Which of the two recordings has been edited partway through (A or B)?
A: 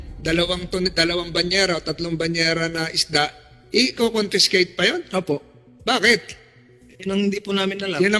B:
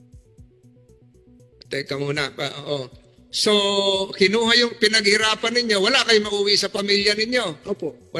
B